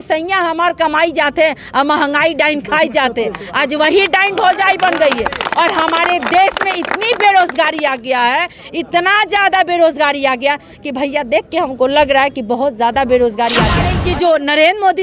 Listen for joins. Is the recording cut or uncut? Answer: cut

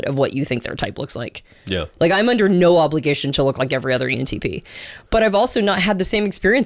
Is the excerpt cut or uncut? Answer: uncut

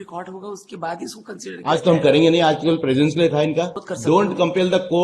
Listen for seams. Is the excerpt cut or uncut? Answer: cut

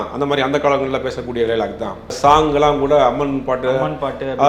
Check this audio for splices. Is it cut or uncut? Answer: cut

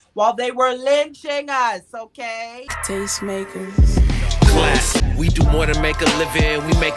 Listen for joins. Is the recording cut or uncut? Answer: cut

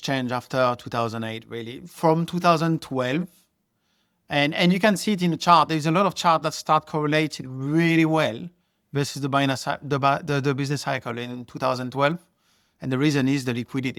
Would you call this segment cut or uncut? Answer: uncut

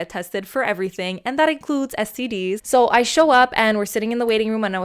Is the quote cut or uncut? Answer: cut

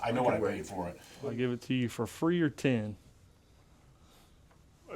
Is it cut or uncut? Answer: cut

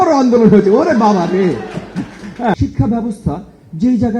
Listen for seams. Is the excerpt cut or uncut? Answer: cut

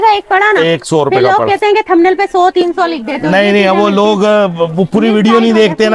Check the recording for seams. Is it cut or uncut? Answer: uncut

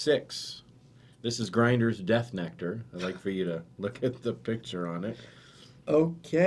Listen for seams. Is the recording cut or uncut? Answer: uncut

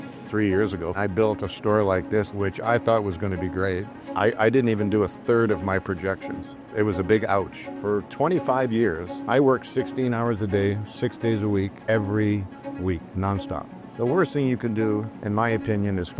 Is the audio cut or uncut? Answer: cut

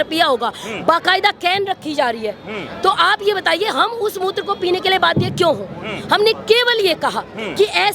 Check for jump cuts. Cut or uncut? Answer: uncut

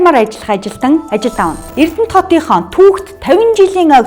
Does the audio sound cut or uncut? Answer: cut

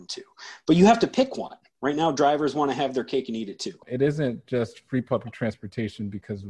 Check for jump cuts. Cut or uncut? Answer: cut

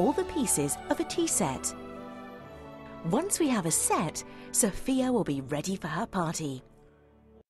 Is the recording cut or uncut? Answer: cut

